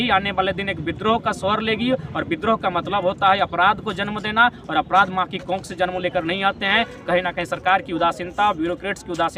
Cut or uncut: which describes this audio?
uncut